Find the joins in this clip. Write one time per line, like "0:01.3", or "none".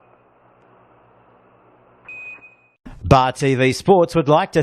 0:02.4